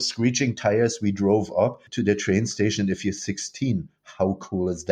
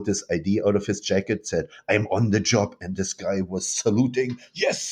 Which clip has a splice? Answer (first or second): first